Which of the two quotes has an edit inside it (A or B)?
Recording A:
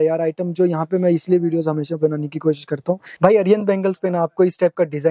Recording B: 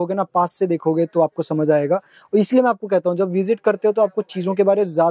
A